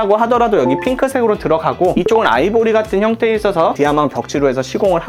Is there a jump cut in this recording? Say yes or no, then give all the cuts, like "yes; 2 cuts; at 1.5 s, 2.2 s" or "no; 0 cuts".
no; 0 cuts